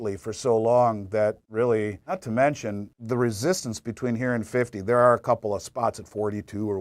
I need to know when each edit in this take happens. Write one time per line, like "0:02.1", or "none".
0:02.0
0:02.9